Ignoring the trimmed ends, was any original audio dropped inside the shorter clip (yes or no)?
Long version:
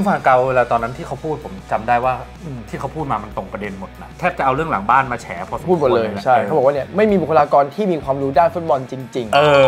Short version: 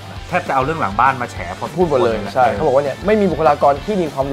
no